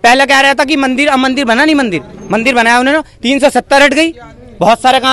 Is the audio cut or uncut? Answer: uncut